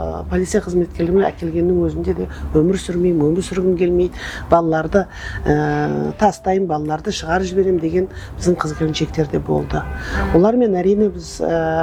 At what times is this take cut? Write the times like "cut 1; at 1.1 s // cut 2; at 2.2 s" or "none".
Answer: none